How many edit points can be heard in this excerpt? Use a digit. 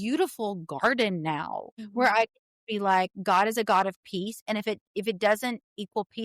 0